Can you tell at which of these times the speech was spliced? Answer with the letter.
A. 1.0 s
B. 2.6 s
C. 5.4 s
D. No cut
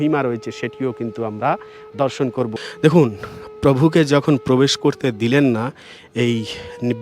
B